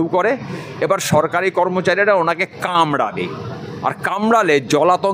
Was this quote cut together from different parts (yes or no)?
no